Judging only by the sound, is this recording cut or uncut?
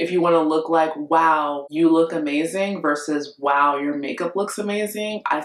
cut